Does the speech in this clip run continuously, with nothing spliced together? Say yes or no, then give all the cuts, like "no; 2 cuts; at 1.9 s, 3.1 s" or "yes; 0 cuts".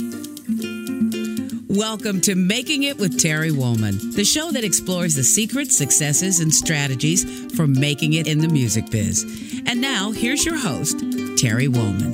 yes; 0 cuts